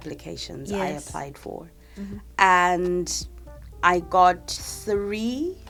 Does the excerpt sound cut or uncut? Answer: uncut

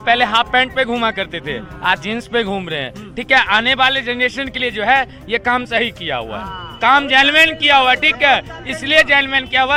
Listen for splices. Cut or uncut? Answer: uncut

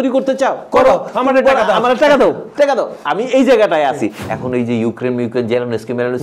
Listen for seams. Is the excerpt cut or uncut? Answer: cut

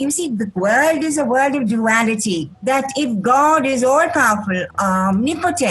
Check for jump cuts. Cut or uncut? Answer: cut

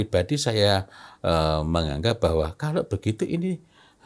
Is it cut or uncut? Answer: uncut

